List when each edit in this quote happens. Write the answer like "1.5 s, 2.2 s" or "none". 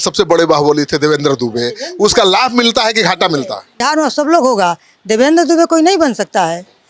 3.8 s